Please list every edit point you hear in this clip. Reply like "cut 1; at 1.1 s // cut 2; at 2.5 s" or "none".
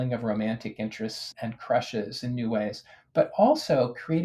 cut 1; at 1.3 s